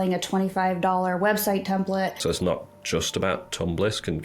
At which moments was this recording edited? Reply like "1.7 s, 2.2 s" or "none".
2.2 s

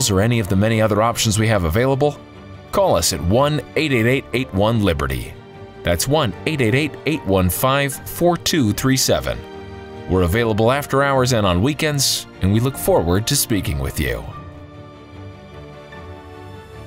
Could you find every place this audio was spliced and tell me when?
14.3 s

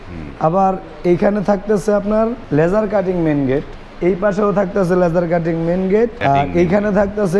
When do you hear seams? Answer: 2.4 s, 3.8 s, 6.2 s

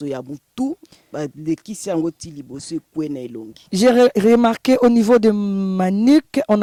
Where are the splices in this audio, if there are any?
none

